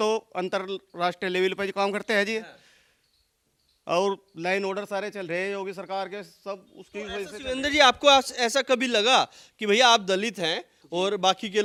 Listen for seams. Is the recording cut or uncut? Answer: uncut